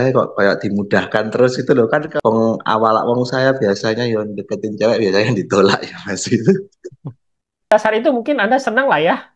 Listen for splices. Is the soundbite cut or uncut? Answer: cut